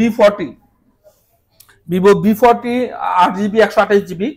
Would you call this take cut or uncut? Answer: uncut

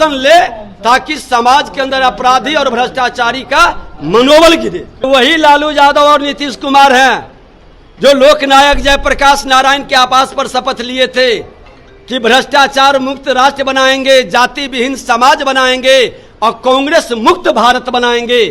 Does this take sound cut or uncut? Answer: cut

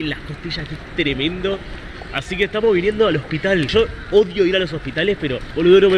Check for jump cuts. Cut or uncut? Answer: uncut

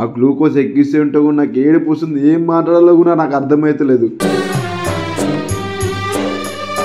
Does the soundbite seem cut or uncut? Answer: uncut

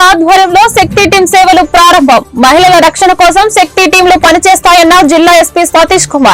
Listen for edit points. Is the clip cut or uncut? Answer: uncut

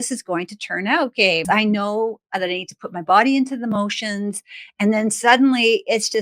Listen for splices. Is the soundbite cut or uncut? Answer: cut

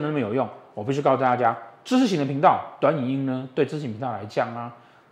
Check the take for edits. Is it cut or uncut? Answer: uncut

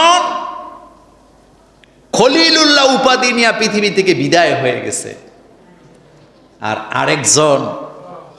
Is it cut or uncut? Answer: uncut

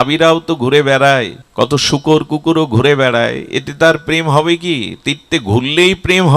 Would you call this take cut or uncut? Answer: cut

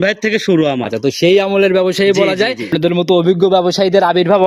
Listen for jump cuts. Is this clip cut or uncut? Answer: cut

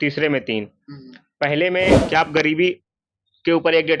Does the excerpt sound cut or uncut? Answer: cut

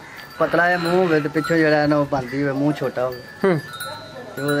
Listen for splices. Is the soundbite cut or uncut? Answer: uncut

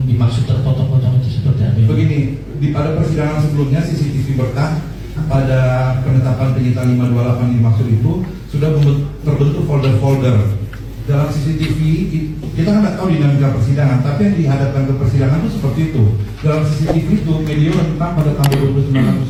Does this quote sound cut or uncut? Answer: uncut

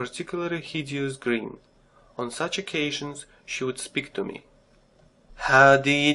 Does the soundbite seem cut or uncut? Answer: uncut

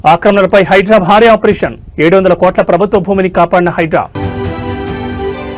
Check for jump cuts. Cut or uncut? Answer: uncut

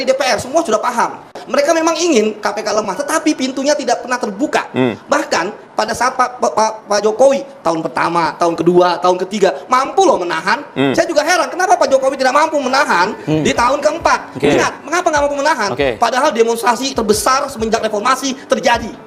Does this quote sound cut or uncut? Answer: uncut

